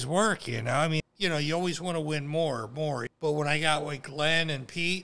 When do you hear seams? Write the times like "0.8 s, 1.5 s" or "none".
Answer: 1.0 s, 3.1 s